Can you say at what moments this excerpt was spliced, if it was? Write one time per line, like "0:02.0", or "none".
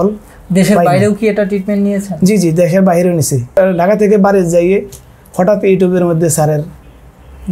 0:03.6